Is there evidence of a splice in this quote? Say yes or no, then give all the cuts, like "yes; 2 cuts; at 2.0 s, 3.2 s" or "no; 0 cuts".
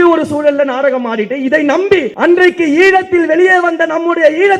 yes; 1 cut; at 2.1 s